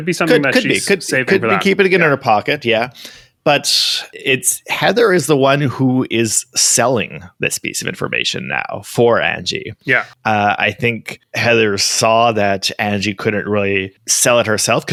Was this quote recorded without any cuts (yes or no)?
yes